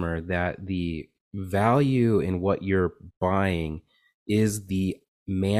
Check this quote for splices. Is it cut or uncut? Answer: uncut